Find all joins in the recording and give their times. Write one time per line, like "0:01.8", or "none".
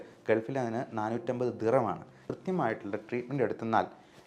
0:02.2